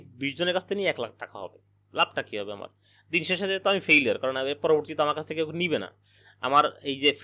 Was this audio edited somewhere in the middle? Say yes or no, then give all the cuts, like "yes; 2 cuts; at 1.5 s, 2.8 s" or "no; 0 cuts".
no; 0 cuts